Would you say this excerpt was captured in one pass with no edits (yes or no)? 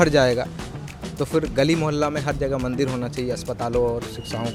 yes